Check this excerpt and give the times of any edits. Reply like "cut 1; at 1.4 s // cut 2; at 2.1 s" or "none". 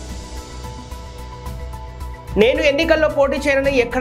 cut 1; at 1.5 s